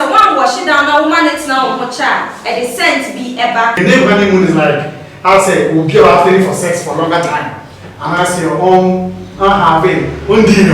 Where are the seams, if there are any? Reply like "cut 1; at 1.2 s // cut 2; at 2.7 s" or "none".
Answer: cut 1; at 3.8 s